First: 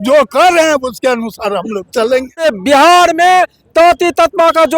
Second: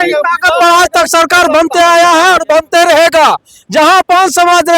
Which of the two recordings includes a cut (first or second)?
first